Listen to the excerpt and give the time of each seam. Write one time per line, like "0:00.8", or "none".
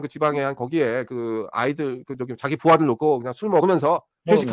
none